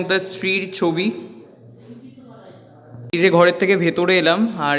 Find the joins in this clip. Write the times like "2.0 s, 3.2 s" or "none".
2.9 s